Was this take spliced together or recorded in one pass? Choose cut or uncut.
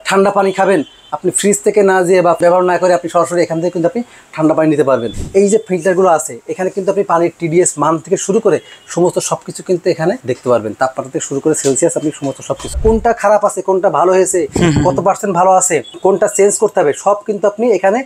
cut